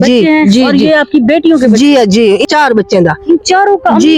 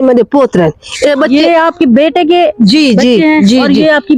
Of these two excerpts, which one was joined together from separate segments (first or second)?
first